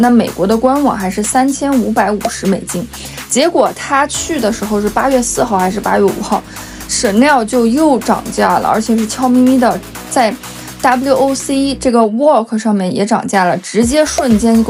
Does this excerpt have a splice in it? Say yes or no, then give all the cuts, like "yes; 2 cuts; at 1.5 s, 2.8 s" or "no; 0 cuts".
no; 0 cuts